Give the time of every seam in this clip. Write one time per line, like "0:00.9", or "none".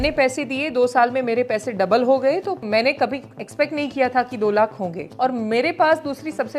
0:02.6
0:05.0

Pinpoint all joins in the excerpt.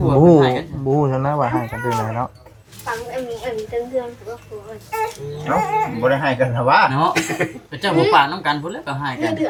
none

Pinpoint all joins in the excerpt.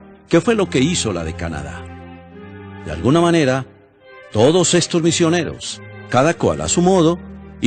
none

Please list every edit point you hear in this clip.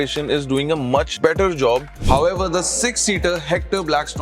0:01.1
0:01.9

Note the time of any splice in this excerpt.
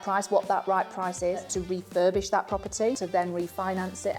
0:01.5
0:03.0

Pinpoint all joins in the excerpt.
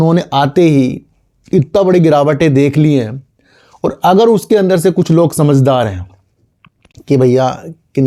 none

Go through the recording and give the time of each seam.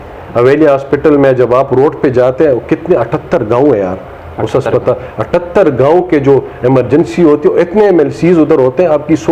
none

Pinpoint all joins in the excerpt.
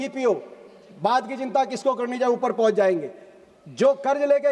none

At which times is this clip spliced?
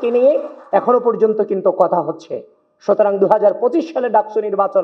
none

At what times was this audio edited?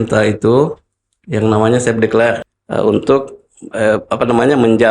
0:02.5

